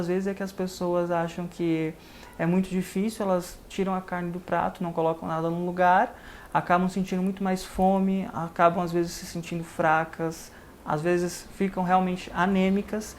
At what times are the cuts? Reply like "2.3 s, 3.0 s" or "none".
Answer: none